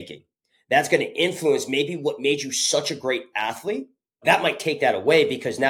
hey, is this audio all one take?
yes; 0 cuts

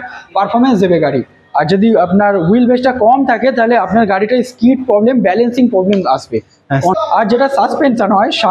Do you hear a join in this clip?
yes; 1 cut; at 6.9 s

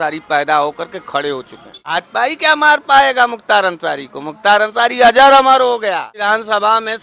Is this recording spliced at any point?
yes; 2 cuts; at 1.9 s, 6.2 s

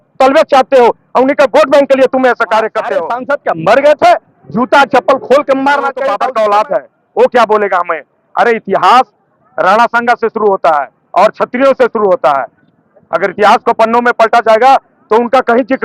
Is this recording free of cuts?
no; 2 cuts; at 3.1 s, 6.2 s

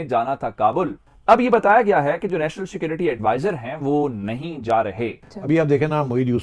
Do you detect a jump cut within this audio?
yes; 2 cuts; at 1.1 s, 5.3 s

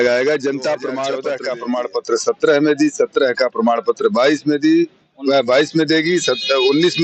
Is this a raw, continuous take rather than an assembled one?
no; 1 cut; at 1.1 s

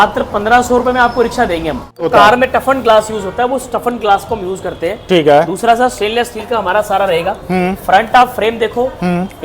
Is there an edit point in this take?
yes; 1 cut; at 2.1 s

